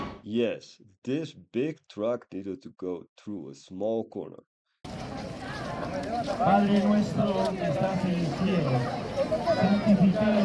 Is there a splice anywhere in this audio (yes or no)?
yes